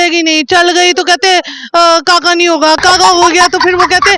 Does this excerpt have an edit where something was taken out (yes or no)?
no